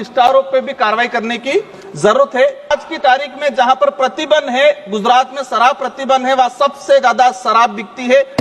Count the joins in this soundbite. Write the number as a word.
one